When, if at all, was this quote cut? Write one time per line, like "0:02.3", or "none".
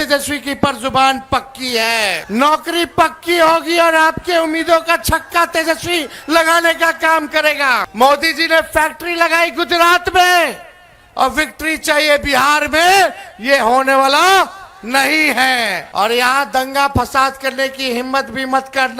0:02.2
0:07.9
0:15.8